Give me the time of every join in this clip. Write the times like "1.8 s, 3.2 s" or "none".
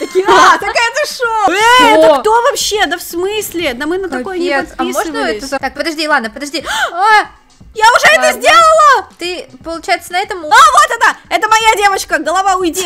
1.5 s, 5.6 s, 10.5 s